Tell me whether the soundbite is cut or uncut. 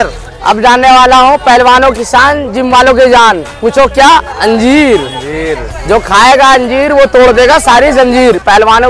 uncut